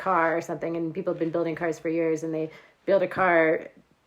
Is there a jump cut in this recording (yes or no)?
no